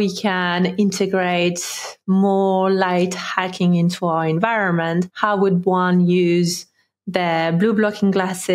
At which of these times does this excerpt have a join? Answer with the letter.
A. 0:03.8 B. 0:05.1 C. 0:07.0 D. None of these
B